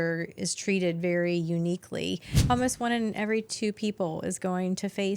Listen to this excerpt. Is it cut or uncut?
cut